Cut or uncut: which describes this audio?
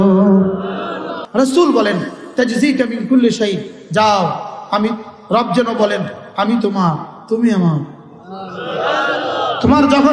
cut